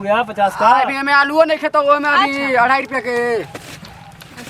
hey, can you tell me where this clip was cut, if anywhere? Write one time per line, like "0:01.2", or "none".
none